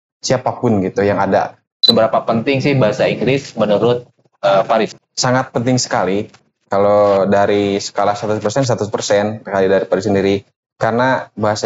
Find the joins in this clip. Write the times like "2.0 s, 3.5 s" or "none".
1.7 s